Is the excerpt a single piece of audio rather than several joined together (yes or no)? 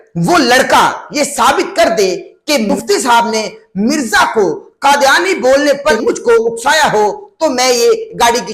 no